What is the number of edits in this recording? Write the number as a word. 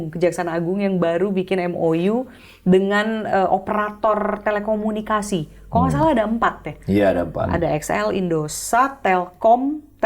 zero